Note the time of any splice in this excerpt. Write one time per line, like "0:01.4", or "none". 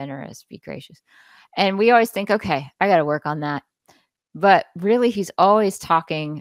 none